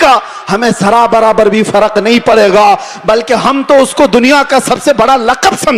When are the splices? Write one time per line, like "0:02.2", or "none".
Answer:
none